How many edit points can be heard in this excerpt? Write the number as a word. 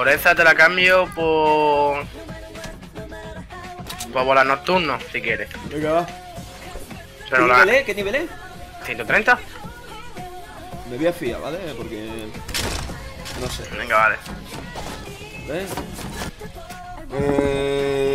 zero